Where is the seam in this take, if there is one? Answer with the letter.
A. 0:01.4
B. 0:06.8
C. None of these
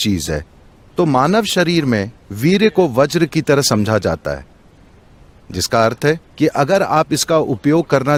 C